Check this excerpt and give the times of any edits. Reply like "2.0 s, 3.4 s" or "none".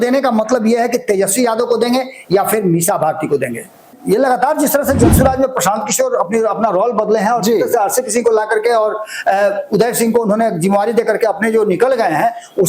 4.0 s